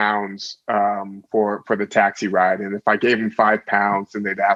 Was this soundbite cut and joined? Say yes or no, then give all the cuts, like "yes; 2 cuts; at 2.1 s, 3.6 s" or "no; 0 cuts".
no; 0 cuts